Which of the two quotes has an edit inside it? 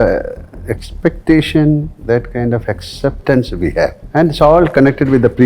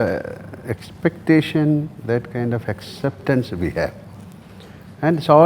first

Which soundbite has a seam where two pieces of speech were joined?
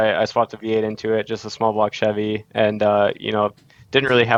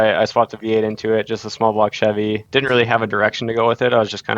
second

